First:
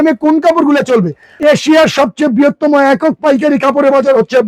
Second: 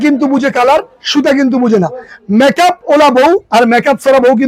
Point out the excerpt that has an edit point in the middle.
first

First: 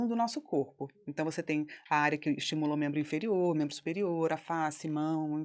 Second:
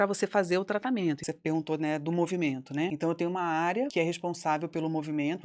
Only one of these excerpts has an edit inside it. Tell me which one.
second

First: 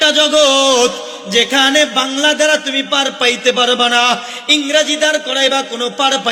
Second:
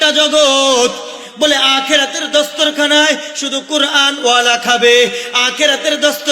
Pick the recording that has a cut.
second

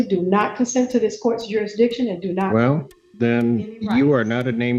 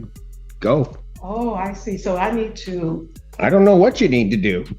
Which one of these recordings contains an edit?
second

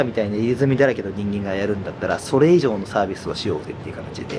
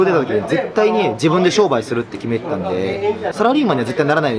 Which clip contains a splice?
second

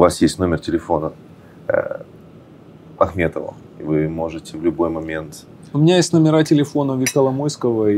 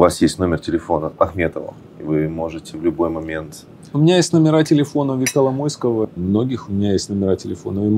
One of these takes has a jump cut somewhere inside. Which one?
second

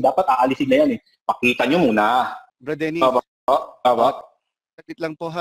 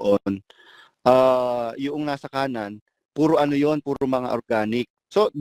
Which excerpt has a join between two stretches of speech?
first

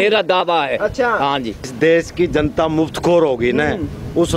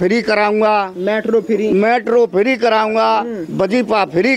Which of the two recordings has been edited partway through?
first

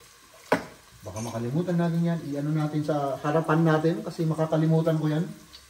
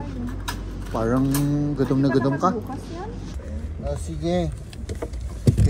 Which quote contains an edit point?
second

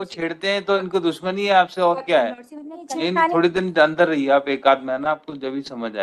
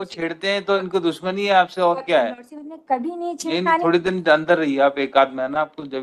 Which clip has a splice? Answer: first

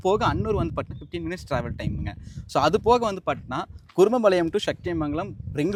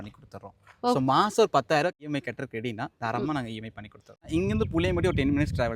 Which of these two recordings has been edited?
second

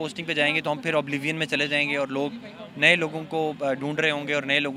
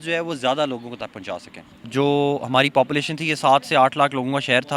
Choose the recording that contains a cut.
second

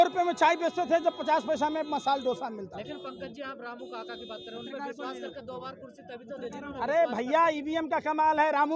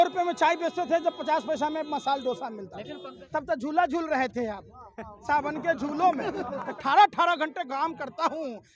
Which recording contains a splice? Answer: second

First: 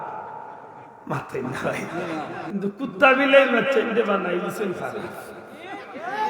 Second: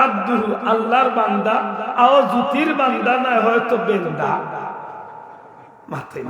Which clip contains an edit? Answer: first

